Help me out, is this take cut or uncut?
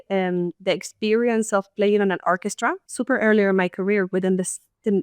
cut